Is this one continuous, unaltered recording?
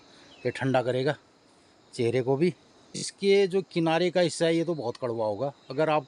no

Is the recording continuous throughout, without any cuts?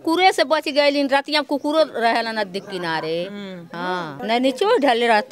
no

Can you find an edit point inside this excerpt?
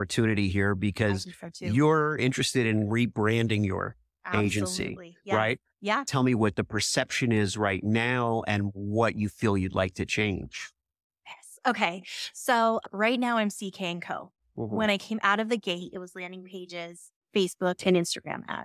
yes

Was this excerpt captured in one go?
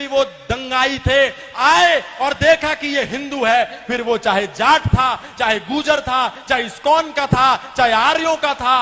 yes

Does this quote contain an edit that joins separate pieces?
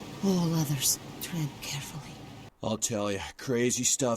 yes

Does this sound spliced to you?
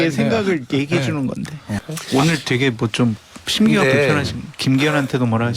yes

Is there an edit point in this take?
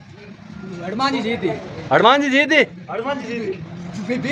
no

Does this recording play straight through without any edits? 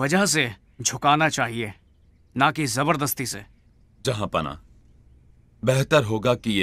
yes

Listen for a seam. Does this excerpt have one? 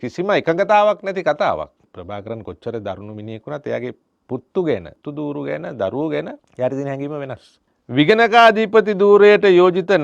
yes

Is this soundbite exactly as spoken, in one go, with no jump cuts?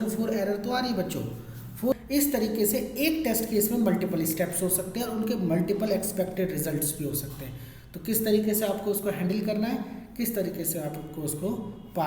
no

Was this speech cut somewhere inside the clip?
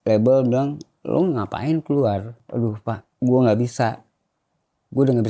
yes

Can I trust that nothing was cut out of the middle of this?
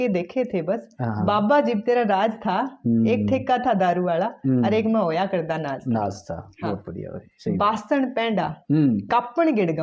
yes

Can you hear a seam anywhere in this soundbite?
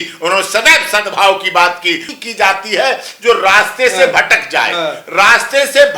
yes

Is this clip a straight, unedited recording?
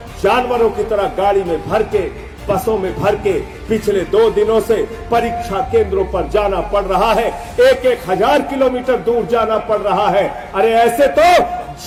yes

